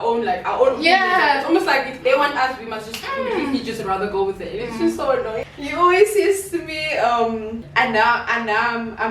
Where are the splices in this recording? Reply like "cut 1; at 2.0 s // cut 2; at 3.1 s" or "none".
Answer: cut 1; at 5.4 s // cut 2; at 7.6 s

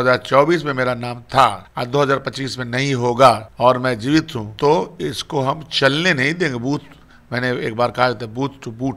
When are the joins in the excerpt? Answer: cut 1; at 1.7 s // cut 2; at 3.5 s // cut 3; at 4.4 s

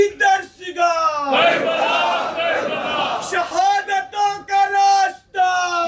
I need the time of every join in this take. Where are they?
none

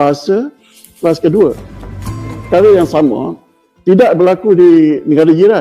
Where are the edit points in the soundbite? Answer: cut 1; at 2.3 s

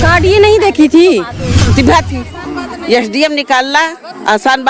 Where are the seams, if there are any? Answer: cut 1; at 1.6 s

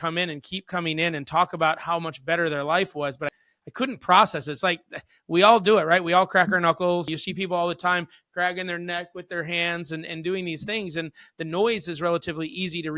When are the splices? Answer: cut 1; at 7.1 s

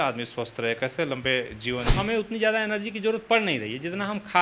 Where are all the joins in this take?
cut 1; at 1.9 s

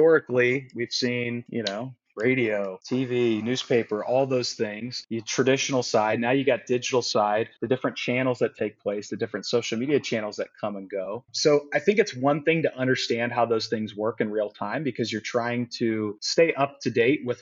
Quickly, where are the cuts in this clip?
none

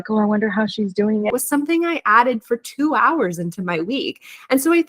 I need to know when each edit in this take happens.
cut 1; at 1.3 s

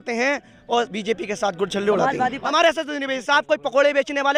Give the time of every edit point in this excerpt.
cut 1; at 2.4 s

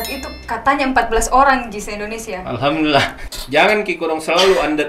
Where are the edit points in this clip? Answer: cut 1; at 3.2 s

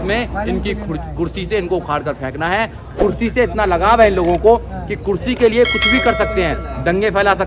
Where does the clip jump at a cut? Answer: none

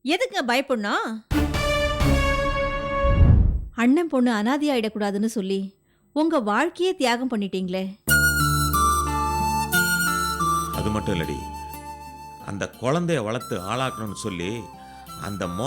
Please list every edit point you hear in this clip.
cut 1; at 3.2 s

